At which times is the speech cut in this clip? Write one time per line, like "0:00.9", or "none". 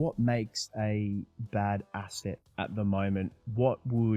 none